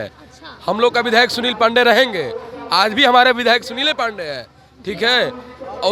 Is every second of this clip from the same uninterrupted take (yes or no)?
yes